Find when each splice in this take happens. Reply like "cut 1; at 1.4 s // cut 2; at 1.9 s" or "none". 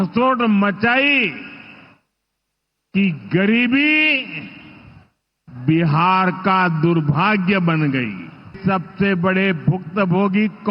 cut 1; at 7.9 s